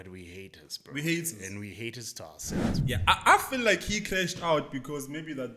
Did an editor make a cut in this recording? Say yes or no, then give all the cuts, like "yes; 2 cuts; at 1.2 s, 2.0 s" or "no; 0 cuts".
yes; 1 cut; at 2.8 s